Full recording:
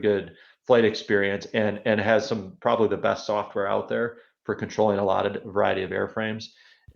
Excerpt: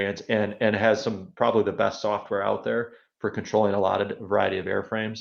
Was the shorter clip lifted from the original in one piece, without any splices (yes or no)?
yes